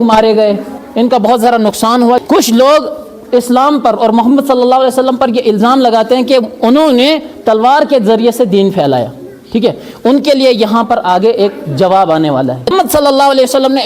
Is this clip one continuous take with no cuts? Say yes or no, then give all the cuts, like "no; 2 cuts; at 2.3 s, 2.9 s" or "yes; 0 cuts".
no; 2 cuts; at 2.2 s, 12.7 s